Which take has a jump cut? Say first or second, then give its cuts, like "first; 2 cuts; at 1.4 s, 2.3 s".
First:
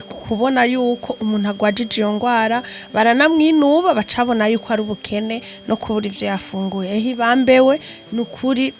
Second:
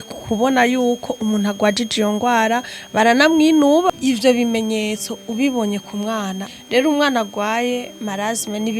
second; 2 cuts; at 3.9 s, 6.5 s